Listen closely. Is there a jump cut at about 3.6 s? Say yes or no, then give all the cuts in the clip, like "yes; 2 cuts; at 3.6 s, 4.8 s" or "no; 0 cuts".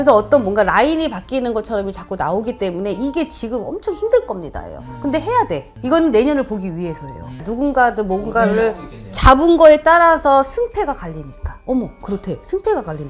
no; 2 cuts; at 5.7 s, 7.5 s